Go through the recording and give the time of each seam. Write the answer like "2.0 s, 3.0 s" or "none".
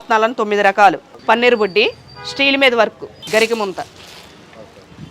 1.1 s, 3.1 s

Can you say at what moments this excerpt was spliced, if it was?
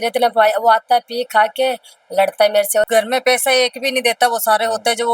2.9 s

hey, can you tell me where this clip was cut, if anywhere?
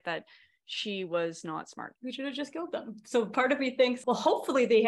1.8 s, 4.0 s

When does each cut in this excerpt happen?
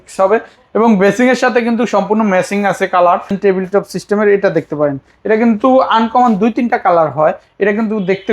3.3 s

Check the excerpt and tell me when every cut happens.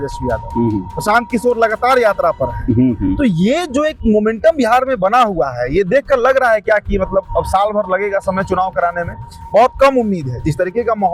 none

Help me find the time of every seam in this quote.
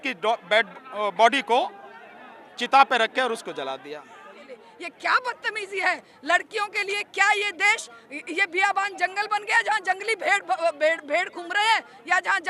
4.7 s

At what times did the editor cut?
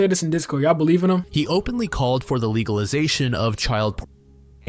1.3 s

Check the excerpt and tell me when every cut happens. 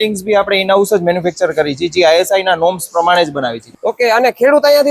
3.6 s

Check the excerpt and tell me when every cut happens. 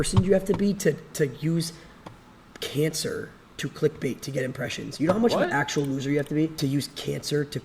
6.5 s

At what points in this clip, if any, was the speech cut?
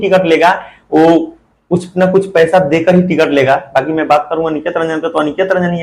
none

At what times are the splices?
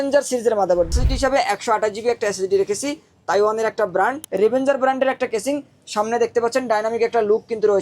0.9 s, 4.2 s

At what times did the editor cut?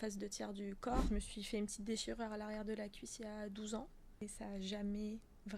1.1 s, 4.2 s

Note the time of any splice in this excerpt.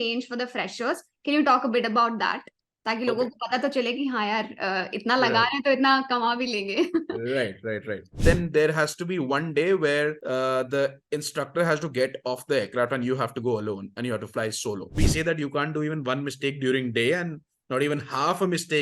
8.2 s, 10.2 s, 15.0 s

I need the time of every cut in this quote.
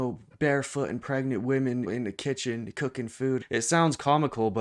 1.9 s, 3.4 s

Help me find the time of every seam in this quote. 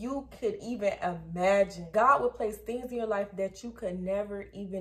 1.8 s

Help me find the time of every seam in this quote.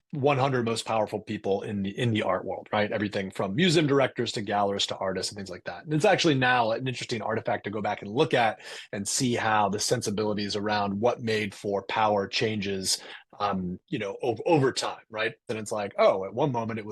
15.5 s

